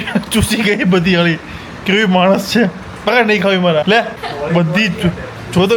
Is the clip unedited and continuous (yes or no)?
yes